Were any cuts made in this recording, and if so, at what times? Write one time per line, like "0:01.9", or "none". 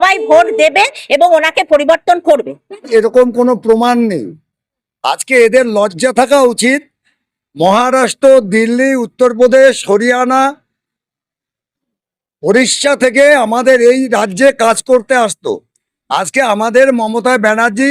0:02.9